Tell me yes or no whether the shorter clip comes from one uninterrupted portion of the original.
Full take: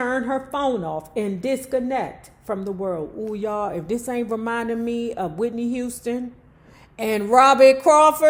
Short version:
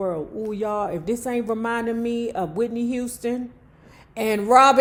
yes